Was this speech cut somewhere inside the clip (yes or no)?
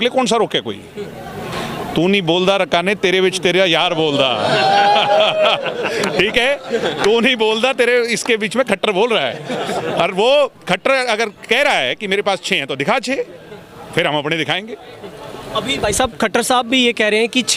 no